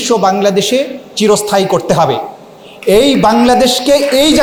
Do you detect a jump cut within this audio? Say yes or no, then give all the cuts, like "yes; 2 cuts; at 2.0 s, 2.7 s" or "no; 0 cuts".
no; 0 cuts